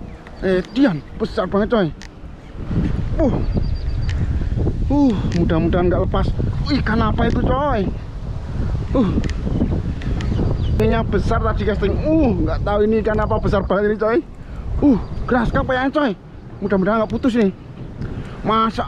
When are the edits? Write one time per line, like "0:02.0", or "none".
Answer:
0:10.8

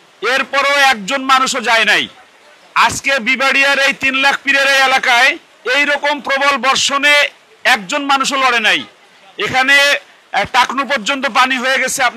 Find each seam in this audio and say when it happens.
0:05.5

